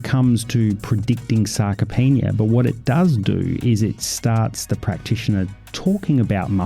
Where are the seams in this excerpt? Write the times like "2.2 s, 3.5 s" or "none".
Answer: none

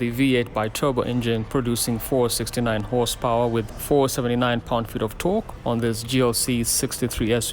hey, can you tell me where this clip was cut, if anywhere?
3.7 s, 5.5 s

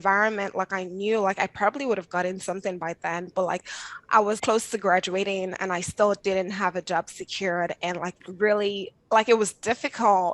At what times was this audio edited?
4.4 s, 8.2 s

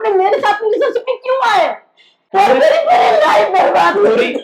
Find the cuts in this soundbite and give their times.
2.3 s

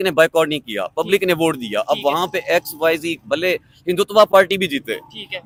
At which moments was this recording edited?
none

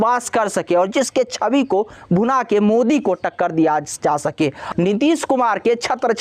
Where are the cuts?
4.6 s

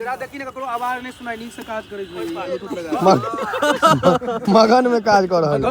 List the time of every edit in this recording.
none

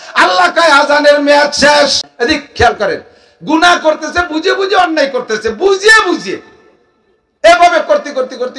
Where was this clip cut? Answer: 2.1 s

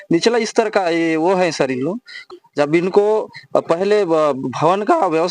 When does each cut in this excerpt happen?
2.1 s

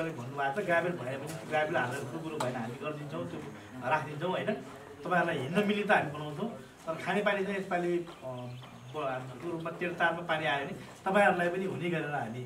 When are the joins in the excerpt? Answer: none

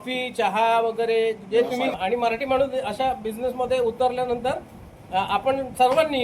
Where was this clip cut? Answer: 1.9 s

